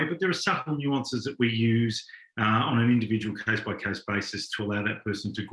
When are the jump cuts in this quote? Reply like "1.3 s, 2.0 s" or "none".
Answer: none